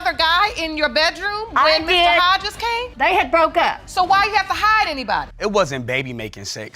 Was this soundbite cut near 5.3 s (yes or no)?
yes